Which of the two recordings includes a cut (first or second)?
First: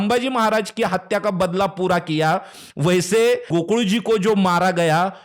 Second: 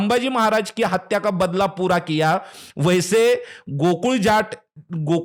first